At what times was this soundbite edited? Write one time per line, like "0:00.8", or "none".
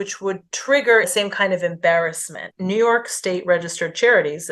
0:01.1
0:02.5